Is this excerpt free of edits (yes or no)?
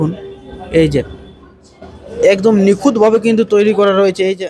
yes